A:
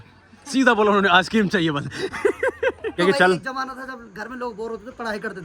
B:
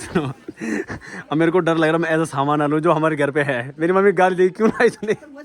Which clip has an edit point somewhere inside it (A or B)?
A